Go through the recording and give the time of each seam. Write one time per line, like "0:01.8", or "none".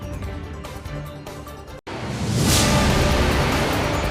0:00.9
0:01.7